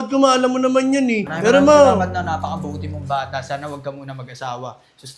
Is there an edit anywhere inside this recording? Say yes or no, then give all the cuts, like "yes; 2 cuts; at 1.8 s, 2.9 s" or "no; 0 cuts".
yes; 1 cut; at 1.3 s